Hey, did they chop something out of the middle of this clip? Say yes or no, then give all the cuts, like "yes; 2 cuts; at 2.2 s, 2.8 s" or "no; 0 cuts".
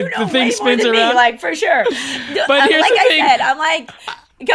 no; 0 cuts